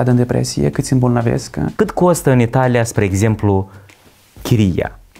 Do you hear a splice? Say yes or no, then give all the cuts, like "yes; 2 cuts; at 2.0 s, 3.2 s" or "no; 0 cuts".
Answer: yes; 1 cut; at 1.7 s